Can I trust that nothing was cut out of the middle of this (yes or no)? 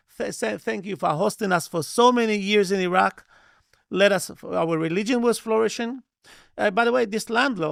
yes